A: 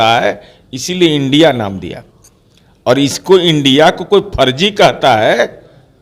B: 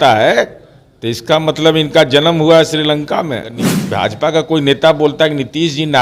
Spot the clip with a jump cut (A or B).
B